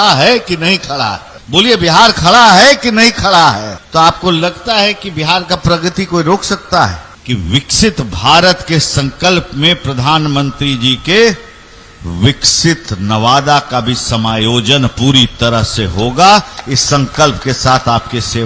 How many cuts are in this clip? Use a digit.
3